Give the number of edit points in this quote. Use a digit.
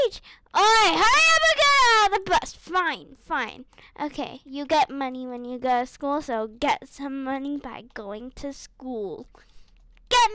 1